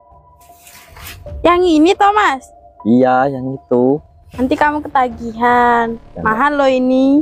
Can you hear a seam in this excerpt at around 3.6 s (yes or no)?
no